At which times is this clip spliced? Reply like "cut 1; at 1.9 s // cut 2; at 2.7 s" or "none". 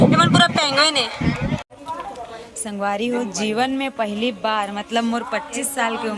cut 1; at 1.6 s